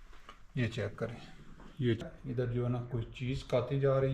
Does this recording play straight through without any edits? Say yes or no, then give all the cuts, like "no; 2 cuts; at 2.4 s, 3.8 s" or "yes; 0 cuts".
no; 1 cut; at 2.0 s